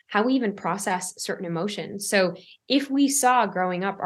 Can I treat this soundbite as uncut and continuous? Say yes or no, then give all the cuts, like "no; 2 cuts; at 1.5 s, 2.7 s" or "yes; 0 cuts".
yes; 0 cuts